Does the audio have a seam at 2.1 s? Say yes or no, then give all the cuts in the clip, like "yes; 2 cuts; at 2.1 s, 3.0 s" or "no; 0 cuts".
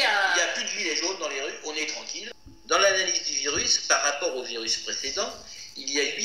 yes; 1 cut; at 2.1 s